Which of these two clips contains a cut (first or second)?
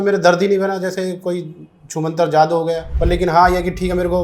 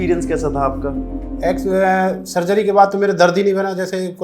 first